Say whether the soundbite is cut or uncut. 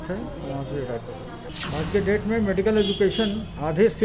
cut